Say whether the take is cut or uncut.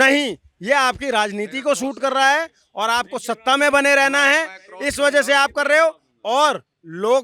uncut